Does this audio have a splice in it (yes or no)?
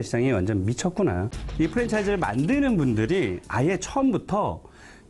yes